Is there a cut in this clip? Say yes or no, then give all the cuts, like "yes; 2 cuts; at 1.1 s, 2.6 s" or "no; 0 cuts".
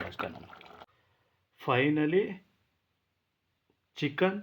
yes; 1 cut; at 1.0 s